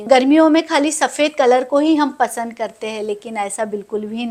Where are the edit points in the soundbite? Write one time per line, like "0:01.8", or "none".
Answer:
none